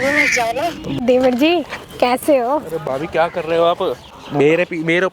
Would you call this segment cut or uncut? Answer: cut